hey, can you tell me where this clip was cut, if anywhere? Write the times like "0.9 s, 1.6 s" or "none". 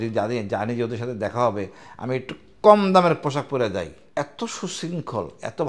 4.0 s